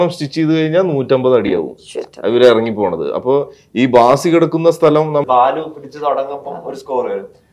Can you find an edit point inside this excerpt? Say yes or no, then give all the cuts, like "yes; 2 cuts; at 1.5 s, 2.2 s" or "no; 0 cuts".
yes; 1 cut; at 5.2 s